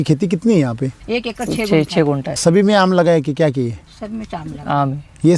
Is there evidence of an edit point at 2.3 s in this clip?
yes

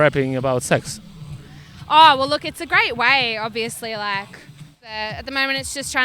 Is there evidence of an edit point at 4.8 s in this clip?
yes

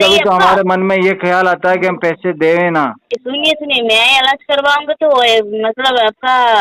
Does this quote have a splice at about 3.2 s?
yes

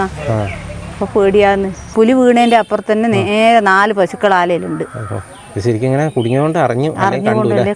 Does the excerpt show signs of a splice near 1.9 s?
yes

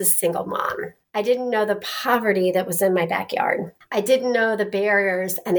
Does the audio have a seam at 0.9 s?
yes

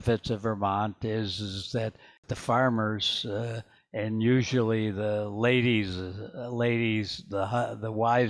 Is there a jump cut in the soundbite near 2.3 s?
yes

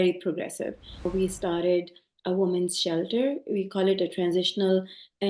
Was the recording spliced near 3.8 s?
no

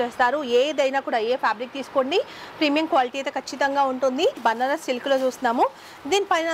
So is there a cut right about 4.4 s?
yes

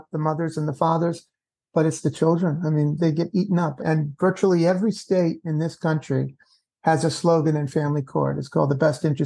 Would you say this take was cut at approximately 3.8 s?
yes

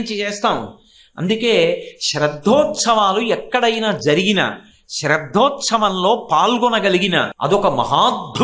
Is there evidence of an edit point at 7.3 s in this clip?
yes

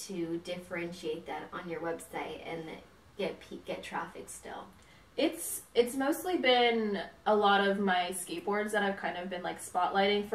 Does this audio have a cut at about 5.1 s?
no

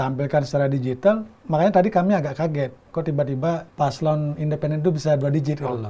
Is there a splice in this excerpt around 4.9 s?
no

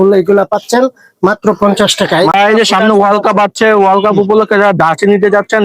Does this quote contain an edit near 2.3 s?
yes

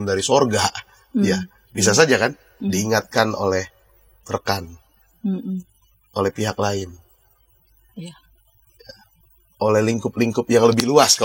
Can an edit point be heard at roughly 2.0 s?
no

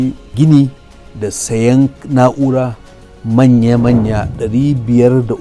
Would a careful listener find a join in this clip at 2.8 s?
no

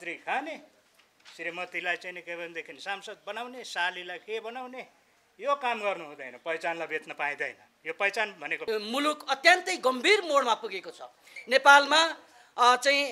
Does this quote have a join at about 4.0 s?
no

